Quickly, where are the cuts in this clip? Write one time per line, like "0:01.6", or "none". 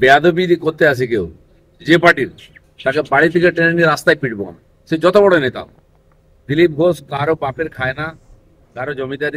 none